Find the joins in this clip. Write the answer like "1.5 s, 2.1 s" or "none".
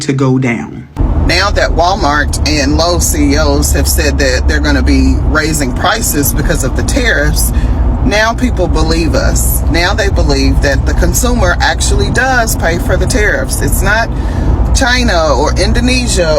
1.0 s